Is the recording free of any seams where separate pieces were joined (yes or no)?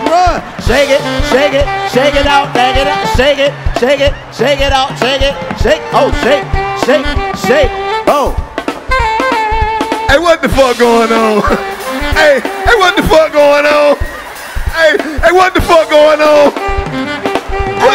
yes